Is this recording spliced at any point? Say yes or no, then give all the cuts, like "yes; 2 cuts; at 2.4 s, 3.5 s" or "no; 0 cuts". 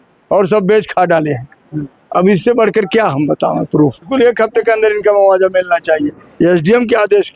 yes; 1 cut; at 4.1 s